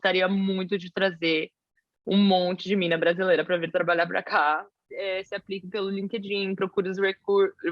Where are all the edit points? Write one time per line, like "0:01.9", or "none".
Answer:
0:04.9